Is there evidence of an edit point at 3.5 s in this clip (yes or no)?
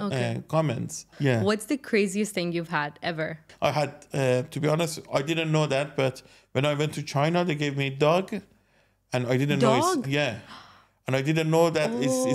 yes